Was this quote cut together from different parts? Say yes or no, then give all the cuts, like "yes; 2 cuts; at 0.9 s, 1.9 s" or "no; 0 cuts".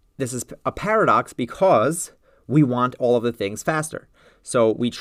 no; 0 cuts